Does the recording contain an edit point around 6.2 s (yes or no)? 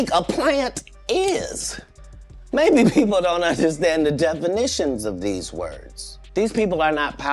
yes